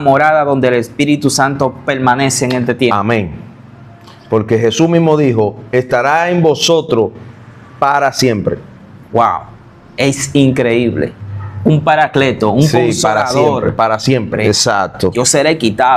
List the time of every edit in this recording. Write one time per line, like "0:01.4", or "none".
0:14.3